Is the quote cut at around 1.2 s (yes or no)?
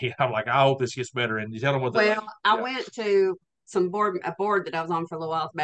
no